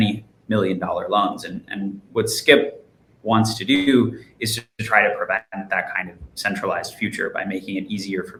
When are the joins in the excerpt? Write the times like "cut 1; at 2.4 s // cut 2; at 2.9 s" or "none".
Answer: none